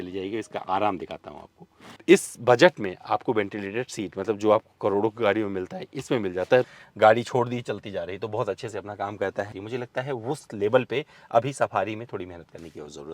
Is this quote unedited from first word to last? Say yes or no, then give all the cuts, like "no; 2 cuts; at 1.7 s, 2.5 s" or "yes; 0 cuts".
no; 3 cuts; at 1.9 s, 6.7 s, 9.5 s